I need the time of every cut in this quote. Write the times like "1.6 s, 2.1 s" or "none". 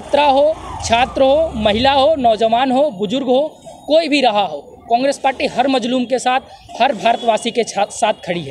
none